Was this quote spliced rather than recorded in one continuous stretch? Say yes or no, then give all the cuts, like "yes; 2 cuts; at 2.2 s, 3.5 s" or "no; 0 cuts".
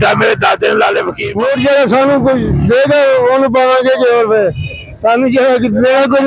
yes; 1 cut; at 1.2 s